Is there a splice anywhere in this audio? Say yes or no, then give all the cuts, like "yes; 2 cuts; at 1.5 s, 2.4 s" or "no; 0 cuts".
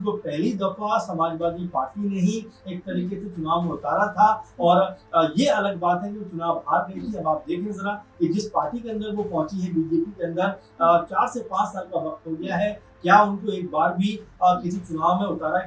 no; 0 cuts